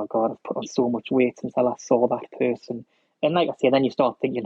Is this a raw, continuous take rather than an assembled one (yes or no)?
yes